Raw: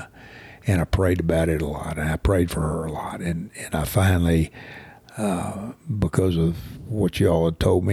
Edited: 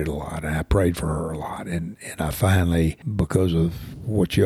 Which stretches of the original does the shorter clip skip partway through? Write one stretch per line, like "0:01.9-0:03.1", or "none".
0:04.6-0:05.9

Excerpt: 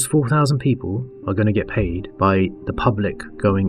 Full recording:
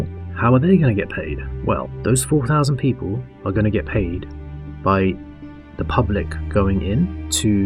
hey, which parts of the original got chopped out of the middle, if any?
0:04.2-0:04.7
0:05.3-0:05.8

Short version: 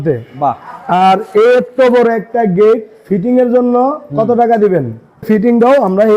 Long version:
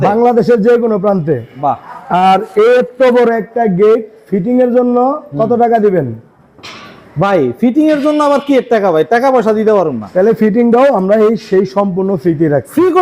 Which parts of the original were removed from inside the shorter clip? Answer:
0:06.5-0:10.4

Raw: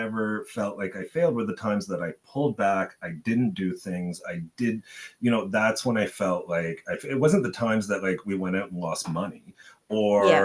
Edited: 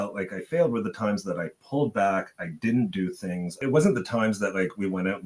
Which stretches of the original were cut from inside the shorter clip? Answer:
0:04.2-0:07.0

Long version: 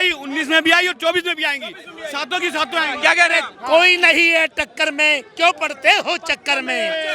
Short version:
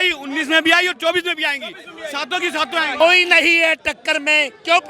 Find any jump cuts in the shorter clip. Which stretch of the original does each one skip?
0:03.0-0:03.7

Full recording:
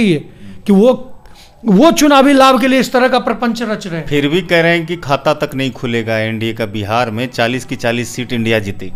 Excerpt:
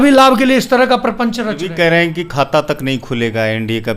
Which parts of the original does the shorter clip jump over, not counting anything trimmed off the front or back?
0:03.9-0:04.4

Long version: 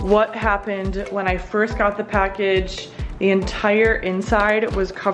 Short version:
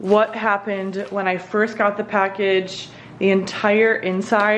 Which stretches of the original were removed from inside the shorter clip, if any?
none

